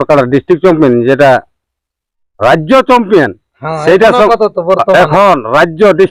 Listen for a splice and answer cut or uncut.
uncut